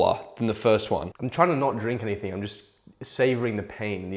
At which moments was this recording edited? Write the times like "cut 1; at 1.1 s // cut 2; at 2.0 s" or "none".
cut 1; at 1.2 s